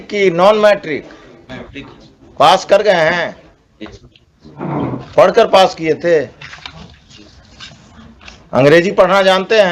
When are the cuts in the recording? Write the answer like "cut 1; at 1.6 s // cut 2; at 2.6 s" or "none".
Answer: none